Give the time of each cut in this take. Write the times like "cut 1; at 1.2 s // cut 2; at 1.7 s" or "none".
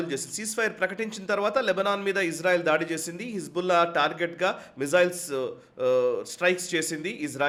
none